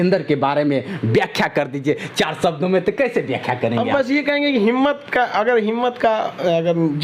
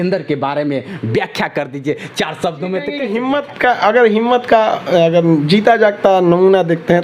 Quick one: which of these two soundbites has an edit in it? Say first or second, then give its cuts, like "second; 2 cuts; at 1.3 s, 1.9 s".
second; 1 cut; at 3.1 s